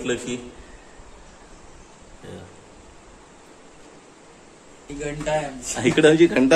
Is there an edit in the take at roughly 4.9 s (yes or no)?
yes